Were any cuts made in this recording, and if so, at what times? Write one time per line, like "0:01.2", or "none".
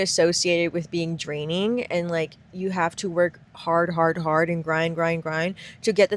none